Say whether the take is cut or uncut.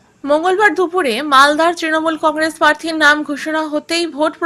uncut